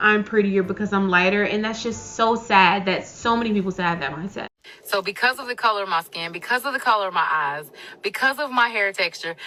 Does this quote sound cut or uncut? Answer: uncut